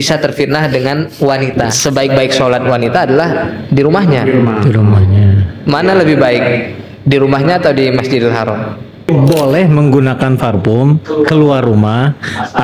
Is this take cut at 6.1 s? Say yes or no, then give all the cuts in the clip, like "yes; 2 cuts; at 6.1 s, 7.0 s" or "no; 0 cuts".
no; 2 cuts; at 1.7 s, 9.1 s